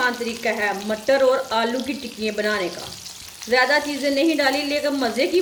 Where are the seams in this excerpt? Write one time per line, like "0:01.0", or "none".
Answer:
none